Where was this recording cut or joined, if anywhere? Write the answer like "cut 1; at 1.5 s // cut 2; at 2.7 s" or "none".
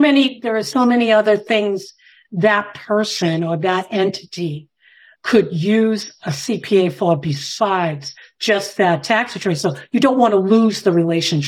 none